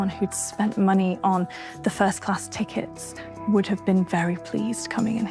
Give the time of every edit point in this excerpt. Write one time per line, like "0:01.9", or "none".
none